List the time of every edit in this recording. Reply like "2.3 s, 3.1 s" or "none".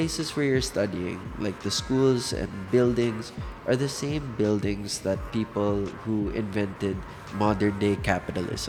none